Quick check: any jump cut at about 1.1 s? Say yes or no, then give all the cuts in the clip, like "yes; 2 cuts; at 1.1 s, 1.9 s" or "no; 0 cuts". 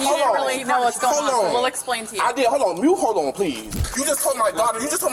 no; 1 cut; at 3.8 s